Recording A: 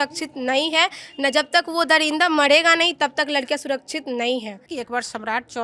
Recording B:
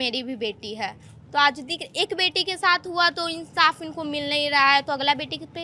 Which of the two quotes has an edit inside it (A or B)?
A